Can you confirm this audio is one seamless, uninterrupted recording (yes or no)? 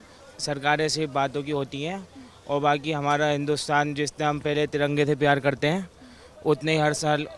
yes